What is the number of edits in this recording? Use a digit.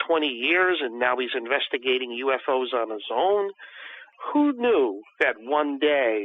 1